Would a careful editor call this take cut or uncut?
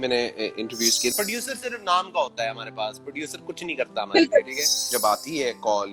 cut